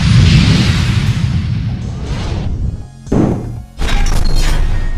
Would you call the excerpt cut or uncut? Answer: uncut